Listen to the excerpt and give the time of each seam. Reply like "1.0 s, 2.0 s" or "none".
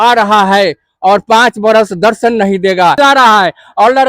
3.0 s